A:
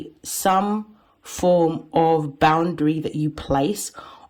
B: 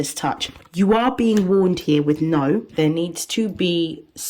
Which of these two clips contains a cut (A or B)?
B